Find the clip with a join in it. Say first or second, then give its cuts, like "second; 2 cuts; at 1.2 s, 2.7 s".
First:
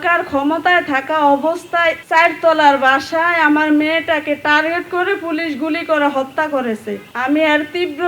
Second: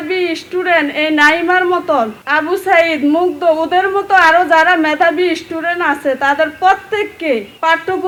first; 1 cut; at 2.0 s